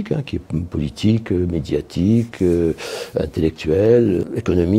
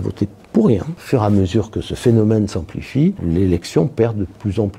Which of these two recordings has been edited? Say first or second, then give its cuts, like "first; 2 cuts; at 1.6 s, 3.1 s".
second; 2 cuts; at 1.0 s, 3.2 s